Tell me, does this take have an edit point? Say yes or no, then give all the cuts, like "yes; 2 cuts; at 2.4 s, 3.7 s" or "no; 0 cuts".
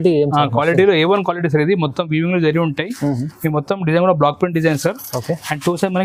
no; 0 cuts